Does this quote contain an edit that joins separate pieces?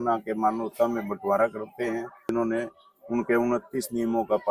yes; 1 cut; at 2.3 s

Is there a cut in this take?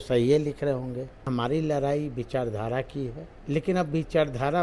yes; 2 cuts; at 1.3 s, 3.3 s

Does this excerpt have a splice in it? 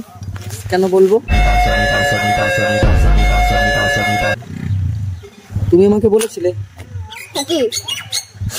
no; 0 cuts

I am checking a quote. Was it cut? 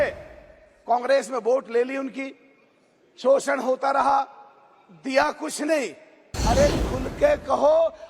yes; 1 cut; at 6.3 s

